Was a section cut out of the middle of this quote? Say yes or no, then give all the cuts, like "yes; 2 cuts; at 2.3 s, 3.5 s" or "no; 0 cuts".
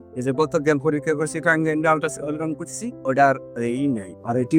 no; 0 cuts